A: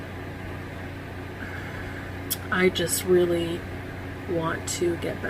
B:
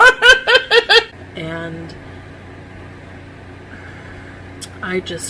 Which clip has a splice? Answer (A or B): B